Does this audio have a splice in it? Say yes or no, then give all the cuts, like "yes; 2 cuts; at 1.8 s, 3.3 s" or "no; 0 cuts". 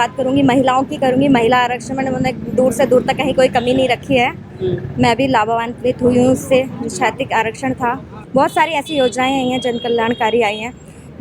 no; 0 cuts